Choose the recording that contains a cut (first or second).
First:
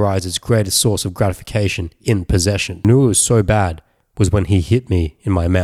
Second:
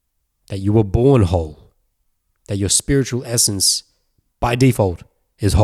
first